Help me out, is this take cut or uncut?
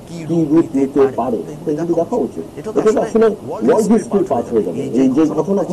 uncut